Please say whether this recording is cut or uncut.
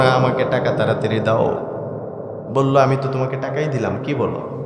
uncut